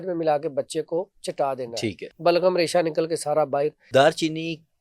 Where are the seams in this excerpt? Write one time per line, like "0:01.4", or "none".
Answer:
0:02.1
0:03.8